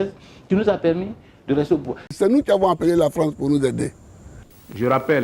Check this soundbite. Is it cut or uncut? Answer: cut